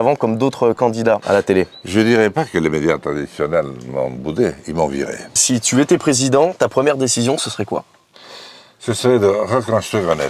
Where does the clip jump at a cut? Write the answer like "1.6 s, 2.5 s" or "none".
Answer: 1.2 s, 5.4 s

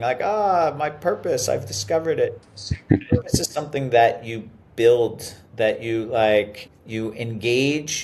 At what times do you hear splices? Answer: none

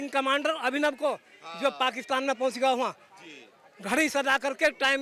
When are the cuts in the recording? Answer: none

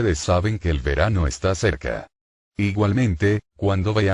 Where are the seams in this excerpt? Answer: none

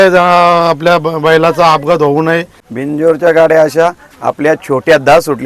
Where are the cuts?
2.6 s

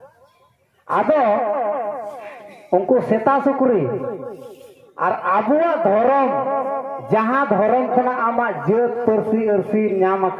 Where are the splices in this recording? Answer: none

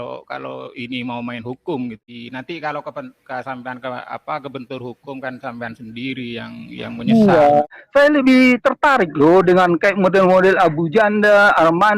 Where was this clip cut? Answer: 2.1 s, 7.7 s

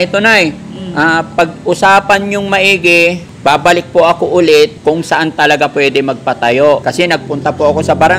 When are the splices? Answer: 3.3 s, 4.8 s, 6.9 s

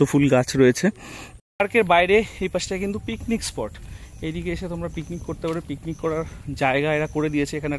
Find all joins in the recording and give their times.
1.3 s

